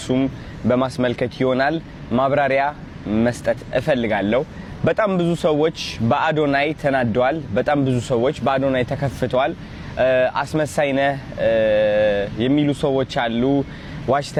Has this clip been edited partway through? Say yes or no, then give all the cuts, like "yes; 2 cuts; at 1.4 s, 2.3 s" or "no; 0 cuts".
no; 0 cuts